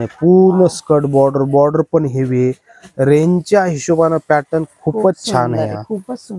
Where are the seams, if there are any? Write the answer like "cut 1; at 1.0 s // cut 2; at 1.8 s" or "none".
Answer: none

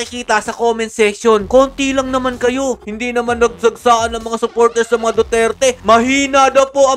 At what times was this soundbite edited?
cut 1; at 2.8 s

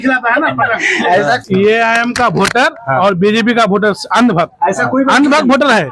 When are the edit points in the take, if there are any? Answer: cut 1; at 1.4 s

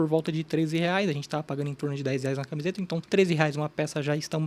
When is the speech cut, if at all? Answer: cut 1; at 3.0 s

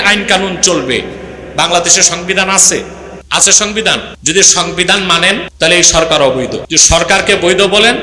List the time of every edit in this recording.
cut 1; at 4.1 s // cut 2; at 5.5 s // cut 3; at 6.7 s

